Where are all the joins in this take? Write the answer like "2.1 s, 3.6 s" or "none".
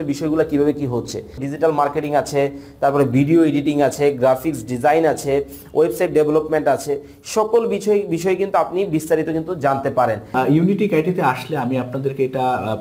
1.4 s, 10.3 s